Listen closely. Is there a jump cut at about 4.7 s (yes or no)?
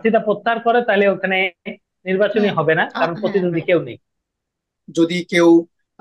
yes